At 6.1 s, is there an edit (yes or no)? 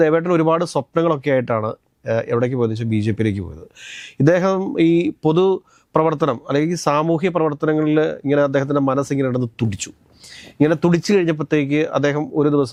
no